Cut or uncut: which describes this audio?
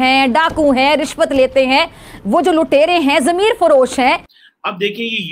cut